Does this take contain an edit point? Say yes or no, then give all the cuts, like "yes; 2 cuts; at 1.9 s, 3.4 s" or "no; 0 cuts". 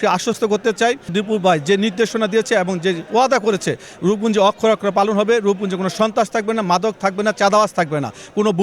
yes; 1 cut; at 1.1 s